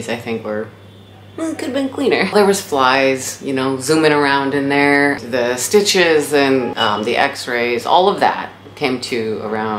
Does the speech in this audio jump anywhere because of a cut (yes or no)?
yes